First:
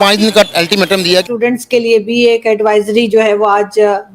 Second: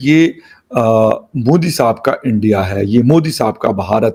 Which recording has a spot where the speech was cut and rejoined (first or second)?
first